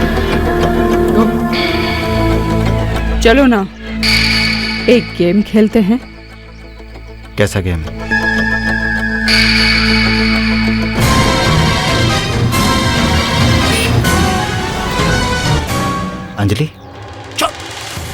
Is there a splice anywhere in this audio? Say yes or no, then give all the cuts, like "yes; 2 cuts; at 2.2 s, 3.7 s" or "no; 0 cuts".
yes; 1 cut; at 8.1 s